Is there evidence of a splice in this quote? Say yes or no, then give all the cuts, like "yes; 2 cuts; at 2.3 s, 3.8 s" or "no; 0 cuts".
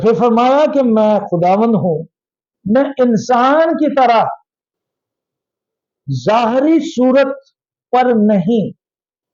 no; 0 cuts